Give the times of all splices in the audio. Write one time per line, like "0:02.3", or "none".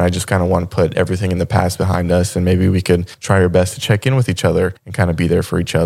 0:03.1
0:04.8